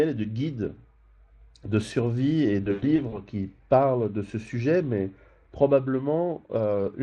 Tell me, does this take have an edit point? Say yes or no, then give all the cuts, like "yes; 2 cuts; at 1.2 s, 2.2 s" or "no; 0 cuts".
yes; 1 cut; at 2.1 s